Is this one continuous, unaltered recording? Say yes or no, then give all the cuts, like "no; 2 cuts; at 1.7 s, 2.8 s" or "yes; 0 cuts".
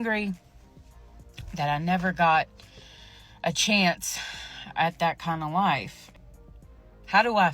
no; 1 cut; at 6.0 s